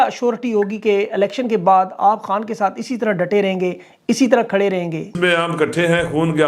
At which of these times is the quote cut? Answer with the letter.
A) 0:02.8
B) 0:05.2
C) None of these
B